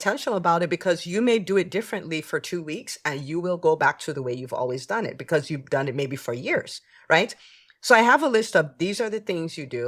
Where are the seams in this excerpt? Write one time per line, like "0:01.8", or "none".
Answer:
none